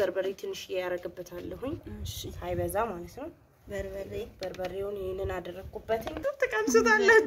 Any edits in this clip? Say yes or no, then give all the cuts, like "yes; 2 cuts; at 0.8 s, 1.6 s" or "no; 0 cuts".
yes; 1 cut; at 6.2 s